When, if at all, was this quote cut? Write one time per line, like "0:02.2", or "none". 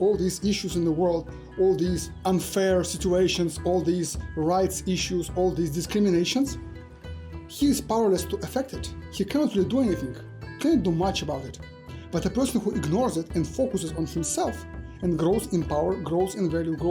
0:02.1